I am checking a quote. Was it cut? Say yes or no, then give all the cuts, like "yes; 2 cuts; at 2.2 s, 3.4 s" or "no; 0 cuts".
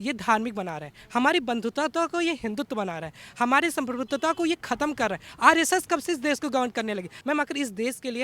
yes; 1 cut; at 7.1 s